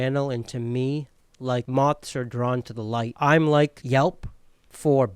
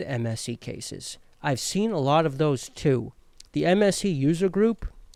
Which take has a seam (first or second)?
first